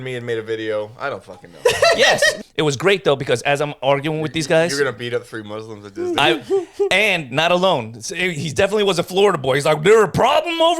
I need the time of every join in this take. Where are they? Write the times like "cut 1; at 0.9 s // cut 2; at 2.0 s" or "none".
cut 1; at 2.4 s